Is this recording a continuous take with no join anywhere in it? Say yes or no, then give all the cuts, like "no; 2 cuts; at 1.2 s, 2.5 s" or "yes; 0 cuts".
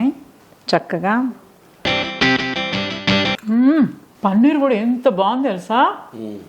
no; 2 cuts; at 3.4 s, 4.0 s